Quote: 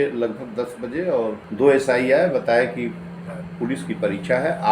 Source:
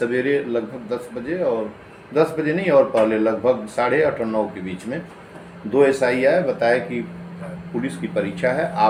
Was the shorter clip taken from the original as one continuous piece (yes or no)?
no